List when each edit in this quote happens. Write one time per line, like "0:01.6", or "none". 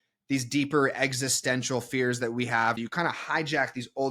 0:02.8